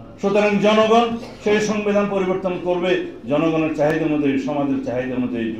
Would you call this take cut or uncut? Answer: uncut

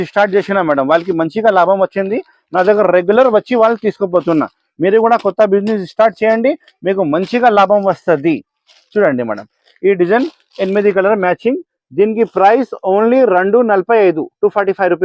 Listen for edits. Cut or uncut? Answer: uncut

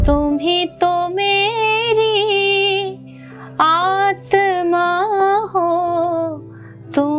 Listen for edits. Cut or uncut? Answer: uncut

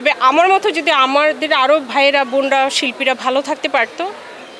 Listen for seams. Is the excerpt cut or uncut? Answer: uncut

